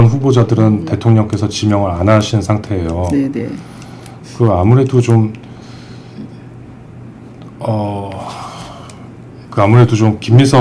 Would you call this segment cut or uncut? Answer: uncut